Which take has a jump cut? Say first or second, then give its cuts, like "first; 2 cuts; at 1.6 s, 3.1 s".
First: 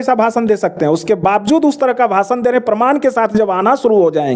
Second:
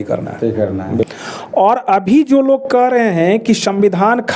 second; 1 cut; at 1.0 s